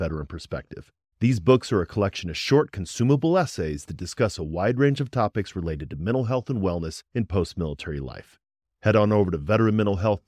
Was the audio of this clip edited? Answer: no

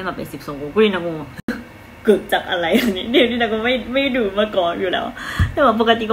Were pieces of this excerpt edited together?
no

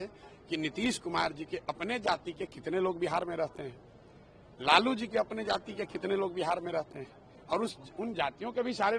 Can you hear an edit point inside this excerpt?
no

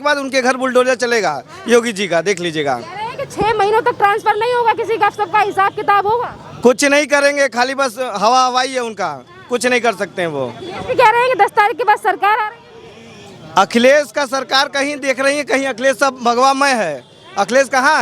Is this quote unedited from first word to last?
yes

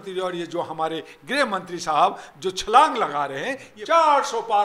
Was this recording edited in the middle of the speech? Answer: yes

